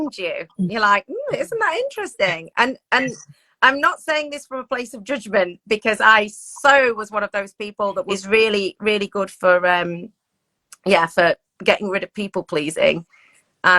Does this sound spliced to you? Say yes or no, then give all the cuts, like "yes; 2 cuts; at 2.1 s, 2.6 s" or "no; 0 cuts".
yes; 1 cut; at 8.1 s